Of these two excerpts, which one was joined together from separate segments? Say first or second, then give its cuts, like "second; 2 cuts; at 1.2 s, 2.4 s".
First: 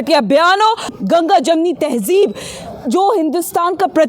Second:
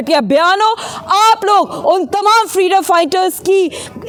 first; 1 cut; at 0.9 s